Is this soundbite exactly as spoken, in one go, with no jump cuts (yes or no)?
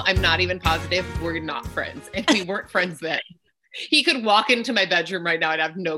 yes